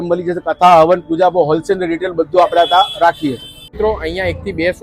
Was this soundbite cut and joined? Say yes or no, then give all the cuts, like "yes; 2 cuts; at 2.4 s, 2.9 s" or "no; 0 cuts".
no; 0 cuts